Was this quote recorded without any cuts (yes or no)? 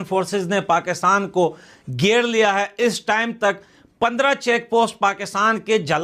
yes